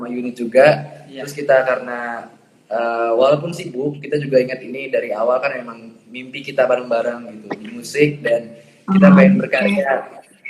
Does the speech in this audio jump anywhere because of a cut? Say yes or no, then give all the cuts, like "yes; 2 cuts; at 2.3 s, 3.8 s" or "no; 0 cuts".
no; 0 cuts